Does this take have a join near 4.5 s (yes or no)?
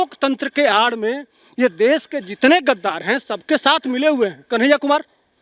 yes